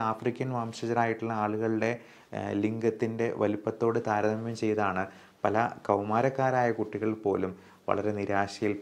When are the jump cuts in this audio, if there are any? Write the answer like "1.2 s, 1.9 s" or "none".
none